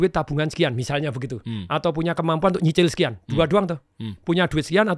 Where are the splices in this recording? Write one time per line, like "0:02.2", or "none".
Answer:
none